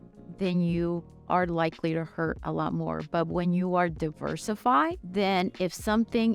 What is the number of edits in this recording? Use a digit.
1